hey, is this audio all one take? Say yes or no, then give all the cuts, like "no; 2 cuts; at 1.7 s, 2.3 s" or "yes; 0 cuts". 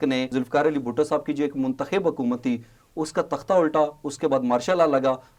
yes; 0 cuts